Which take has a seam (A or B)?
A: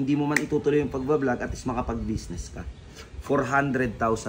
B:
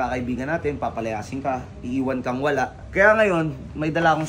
B